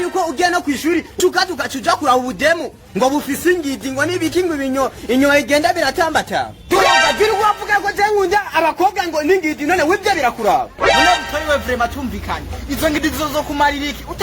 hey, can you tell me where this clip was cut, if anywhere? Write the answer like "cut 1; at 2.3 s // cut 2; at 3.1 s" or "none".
cut 1; at 1.2 s // cut 2; at 10.9 s

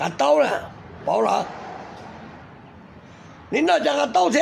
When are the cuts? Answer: none

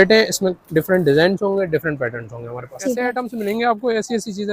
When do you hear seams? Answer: cut 1; at 3.0 s

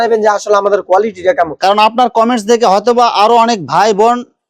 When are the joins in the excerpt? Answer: none

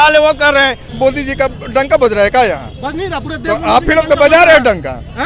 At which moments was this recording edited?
cut 1; at 0.9 s

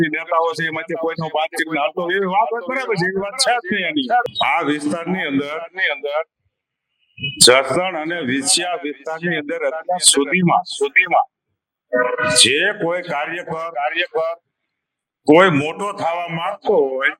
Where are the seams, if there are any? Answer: cut 1; at 4.3 s

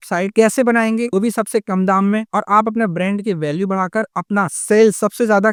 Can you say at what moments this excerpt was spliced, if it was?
none

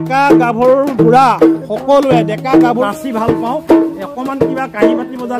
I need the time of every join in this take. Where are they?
cut 1; at 2.9 s

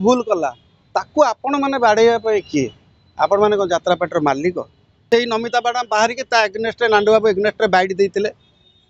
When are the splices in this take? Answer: cut 1; at 5.0 s

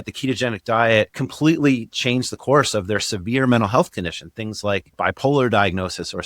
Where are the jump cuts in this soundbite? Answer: cut 1; at 1.2 s // cut 2; at 4.9 s

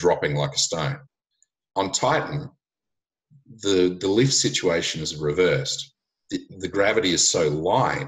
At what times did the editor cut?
cut 1; at 1.1 s

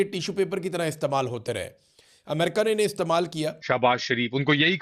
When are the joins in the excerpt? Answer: cut 1; at 3.6 s

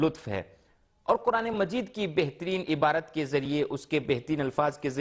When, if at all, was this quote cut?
none

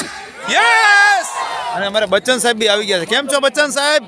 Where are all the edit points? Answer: cut 1; at 1.7 s

